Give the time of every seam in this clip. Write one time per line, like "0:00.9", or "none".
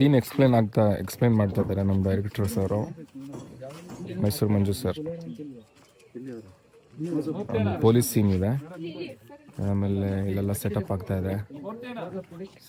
none